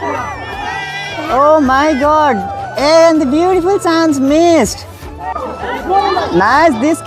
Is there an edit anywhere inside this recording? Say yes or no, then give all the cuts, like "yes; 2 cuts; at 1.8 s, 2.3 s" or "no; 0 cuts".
yes; 1 cut; at 5.4 s